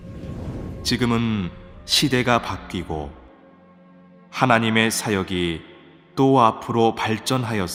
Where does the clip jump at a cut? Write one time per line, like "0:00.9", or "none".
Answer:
none